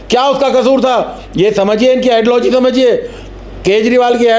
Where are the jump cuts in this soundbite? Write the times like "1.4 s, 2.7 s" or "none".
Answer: none